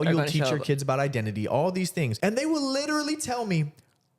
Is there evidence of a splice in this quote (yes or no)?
yes